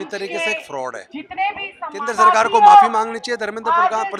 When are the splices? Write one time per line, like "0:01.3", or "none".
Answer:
0:01.8